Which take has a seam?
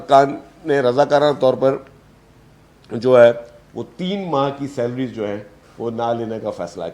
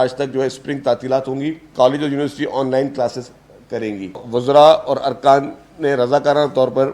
second; 2 cuts; at 1.7 s, 4.2 s

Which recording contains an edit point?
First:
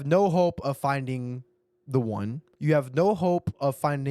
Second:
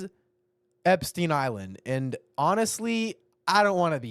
first; 1 cut; at 2.5 s

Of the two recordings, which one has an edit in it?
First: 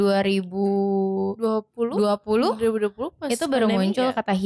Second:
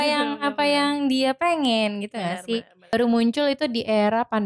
second; 1 cut; at 2.9 s

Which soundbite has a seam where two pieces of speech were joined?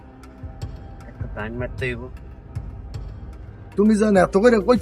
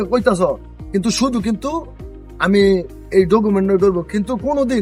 first; 1 cut; at 3.6 s

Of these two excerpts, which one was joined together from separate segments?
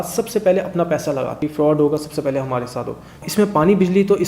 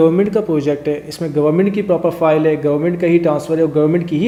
first; 2 cuts; at 1.5 s, 3.2 s

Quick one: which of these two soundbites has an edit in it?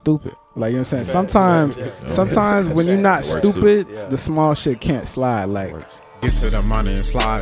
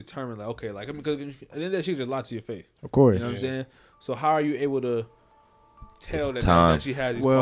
first; 1 cut; at 6.1 s

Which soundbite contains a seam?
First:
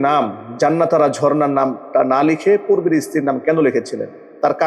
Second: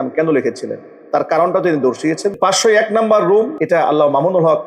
second; 2 cuts; at 2.3 s, 3.6 s

